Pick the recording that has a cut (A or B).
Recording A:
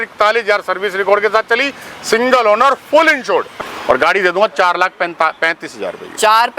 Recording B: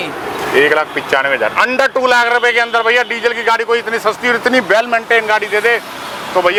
A